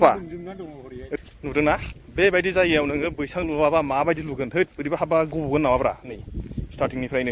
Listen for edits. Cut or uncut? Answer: cut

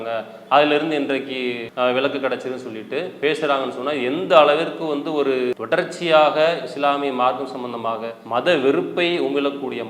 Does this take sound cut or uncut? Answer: cut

